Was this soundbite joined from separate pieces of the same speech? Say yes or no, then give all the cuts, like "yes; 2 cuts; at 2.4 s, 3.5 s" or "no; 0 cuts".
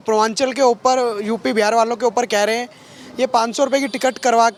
no; 0 cuts